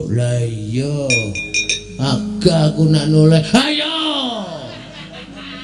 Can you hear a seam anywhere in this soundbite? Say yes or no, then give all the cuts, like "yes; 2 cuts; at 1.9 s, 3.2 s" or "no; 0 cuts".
no; 0 cuts